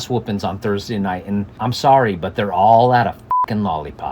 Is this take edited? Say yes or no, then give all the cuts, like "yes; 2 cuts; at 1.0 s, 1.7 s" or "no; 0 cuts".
yes; 1 cut; at 1.5 s